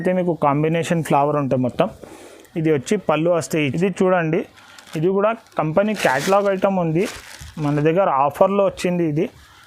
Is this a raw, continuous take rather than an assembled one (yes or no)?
no